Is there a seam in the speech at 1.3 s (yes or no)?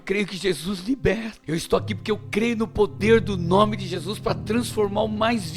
yes